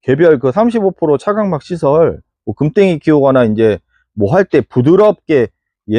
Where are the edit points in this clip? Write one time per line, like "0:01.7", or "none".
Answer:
none